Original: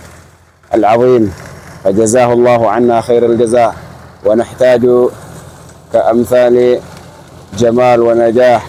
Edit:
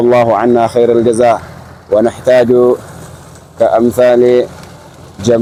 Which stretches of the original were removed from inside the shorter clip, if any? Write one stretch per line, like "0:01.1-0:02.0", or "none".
none